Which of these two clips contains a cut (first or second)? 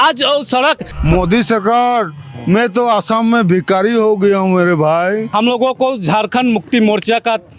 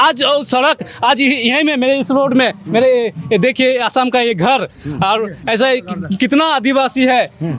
first